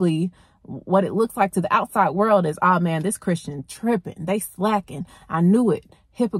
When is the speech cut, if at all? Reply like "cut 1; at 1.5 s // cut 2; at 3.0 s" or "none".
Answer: none

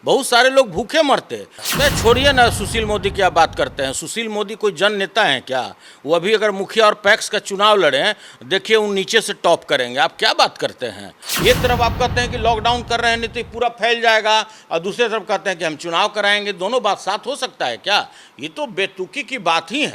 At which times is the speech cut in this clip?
cut 1; at 1.6 s // cut 2; at 11.2 s

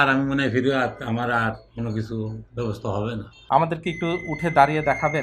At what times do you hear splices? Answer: cut 1; at 3.3 s

